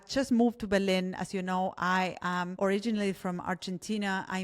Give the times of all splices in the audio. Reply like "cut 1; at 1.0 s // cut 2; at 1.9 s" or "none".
cut 1; at 2.5 s